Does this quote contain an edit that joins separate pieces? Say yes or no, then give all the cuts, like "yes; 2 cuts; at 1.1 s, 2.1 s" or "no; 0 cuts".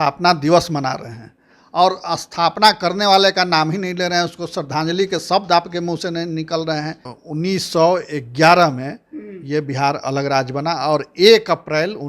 yes; 1 cut; at 7.1 s